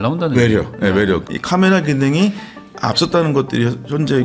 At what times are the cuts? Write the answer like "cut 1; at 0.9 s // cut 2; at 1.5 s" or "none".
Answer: cut 1; at 1.2 s